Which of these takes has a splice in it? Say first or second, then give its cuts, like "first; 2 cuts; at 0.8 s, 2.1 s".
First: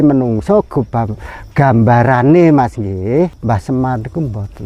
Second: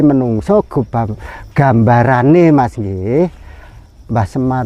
first; 1 cut; at 3.4 s